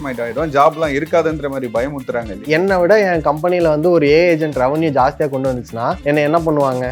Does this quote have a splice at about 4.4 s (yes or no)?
no